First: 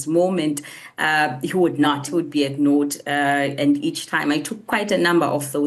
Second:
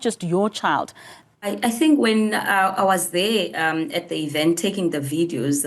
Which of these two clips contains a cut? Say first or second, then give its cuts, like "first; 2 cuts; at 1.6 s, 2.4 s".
second; 1 cut; at 1.1 s